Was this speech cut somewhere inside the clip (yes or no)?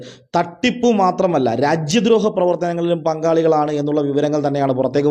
no